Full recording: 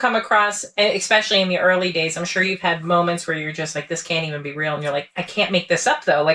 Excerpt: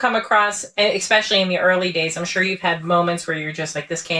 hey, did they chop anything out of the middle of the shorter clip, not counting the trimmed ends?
no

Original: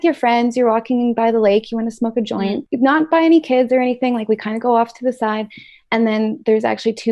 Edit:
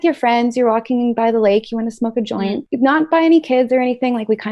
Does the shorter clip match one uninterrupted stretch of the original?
yes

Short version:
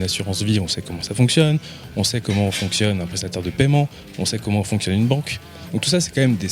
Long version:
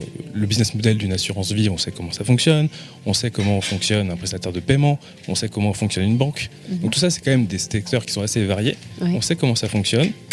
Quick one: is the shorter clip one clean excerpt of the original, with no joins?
yes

